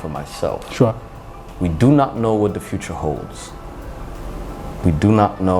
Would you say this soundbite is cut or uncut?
cut